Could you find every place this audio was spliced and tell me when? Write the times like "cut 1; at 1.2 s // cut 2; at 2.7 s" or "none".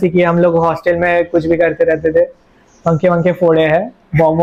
none